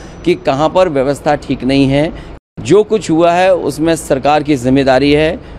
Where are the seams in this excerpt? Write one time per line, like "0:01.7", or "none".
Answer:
0:02.2